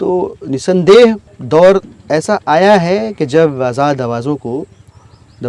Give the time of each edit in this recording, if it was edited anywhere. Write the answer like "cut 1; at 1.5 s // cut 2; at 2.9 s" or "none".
cut 1; at 1.3 s